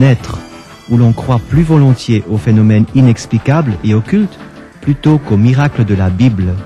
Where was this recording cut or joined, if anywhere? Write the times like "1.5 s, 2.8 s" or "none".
5.3 s